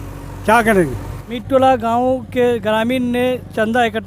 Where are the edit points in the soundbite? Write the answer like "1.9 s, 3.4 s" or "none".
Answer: 1.3 s